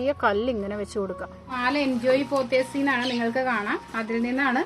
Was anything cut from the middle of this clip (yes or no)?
yes